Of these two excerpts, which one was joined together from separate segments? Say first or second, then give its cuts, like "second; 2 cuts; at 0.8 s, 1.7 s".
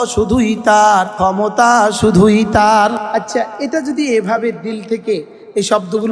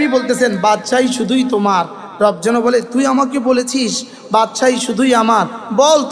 first; 2 cuts; at 1.1 s, 3.0 s